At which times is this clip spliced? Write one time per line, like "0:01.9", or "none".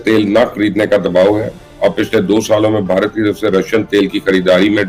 none